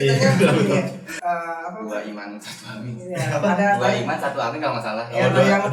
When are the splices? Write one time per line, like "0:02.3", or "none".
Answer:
0:01.1